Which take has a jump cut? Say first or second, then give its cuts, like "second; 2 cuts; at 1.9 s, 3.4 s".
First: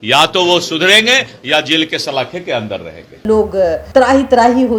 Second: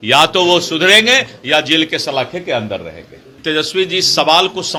first; 1 cut; at 3.2 s